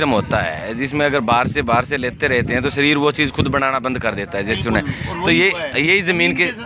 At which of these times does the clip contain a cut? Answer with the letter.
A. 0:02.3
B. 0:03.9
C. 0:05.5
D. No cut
D